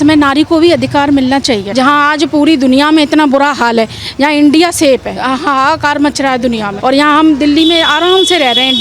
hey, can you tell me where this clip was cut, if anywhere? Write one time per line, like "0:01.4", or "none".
0:01.7
0:05.1